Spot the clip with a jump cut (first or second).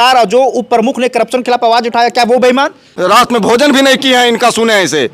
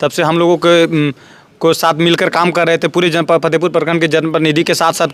first